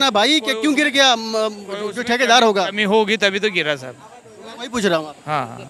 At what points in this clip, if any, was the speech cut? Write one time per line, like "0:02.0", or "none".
none